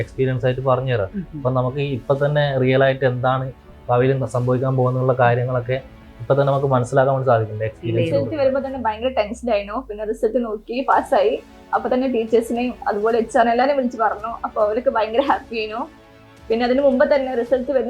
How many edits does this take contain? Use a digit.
1